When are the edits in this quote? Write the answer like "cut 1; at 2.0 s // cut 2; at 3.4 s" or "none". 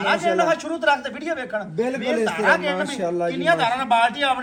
none